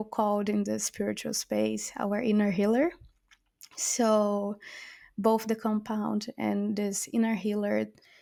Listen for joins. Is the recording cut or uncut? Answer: uncut